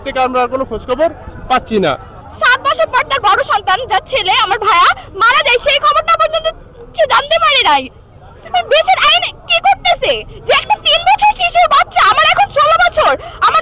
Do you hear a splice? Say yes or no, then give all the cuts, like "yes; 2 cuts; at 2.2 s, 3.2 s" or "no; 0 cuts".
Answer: no; 0 cuts